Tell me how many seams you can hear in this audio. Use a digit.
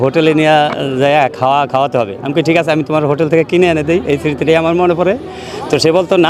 0